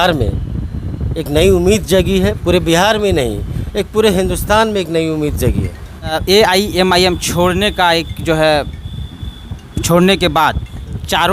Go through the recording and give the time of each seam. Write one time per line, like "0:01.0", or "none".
0:06.2